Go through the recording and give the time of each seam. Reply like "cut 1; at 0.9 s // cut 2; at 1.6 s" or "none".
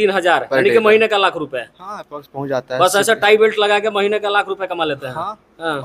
none